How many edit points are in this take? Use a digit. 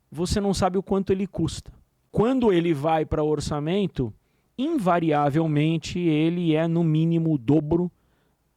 1